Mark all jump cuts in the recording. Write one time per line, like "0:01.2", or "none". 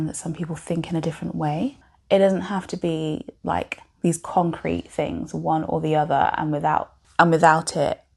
0:01.9
0:07.0